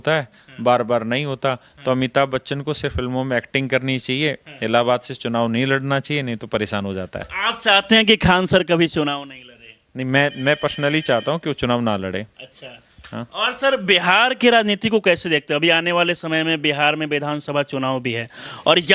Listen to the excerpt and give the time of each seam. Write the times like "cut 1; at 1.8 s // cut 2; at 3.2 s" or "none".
none